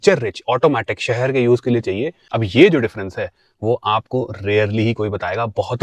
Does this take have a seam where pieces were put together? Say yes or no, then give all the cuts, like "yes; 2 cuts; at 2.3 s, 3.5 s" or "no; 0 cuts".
yes; 1 cut; at 2.2 s